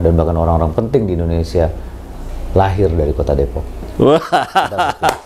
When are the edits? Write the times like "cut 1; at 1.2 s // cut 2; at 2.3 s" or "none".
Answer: none